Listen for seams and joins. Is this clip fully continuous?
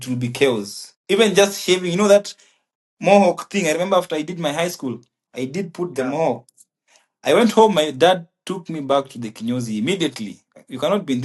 yes; 0 cuts

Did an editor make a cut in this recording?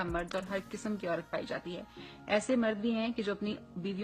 no; 0 cuts

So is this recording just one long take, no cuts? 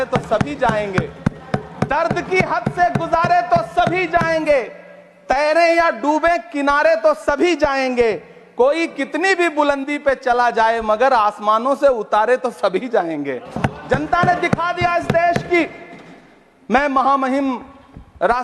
yes; 0 cuts

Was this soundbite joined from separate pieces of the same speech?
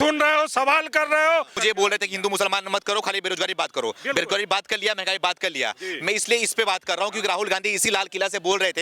yes; 1 cut; at 1.5 s

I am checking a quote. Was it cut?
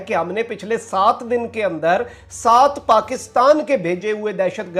no; 0 cuts

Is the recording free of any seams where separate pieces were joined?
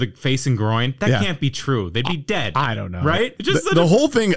no; 1 cut; at 3.4 s

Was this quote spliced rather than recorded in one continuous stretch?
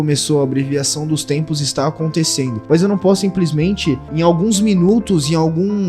yes; 2 cuts; at 2.6 s, 4.1 s

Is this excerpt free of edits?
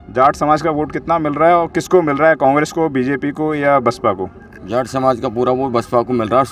yes; 0 cuts

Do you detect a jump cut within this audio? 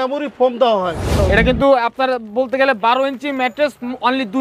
yes; 1 cut; at 1.1 s

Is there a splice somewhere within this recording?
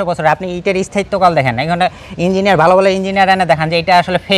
no; 0 cuts

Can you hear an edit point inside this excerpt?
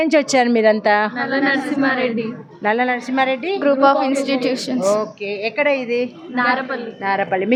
no; 0 cuts

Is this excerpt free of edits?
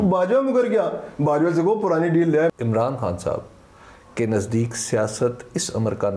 no; 1 cut; at 2.5 s

